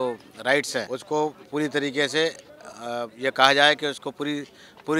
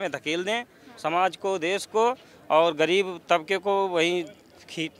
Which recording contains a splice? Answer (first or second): first